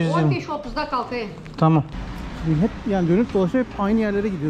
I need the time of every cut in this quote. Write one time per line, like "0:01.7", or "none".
0:02.0